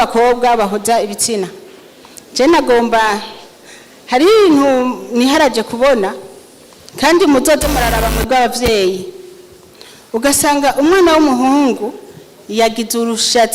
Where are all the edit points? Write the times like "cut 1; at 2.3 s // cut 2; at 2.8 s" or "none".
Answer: none